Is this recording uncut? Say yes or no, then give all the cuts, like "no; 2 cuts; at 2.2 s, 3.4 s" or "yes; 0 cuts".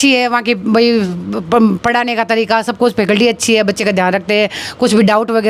yes; 0 cuts